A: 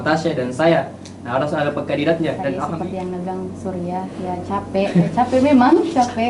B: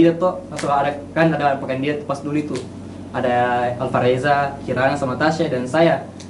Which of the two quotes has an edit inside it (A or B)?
A